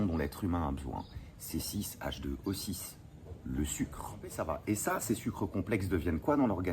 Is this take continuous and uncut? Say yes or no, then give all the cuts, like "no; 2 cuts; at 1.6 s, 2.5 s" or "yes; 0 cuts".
no; 1 cut; at 4.4 s